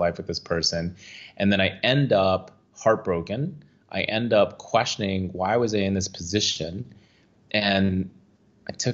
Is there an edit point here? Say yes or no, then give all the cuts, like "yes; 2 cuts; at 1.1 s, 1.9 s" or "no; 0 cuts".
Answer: no; 0 cuts